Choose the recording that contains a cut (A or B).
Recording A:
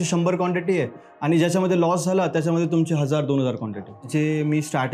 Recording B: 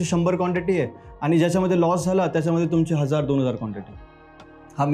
A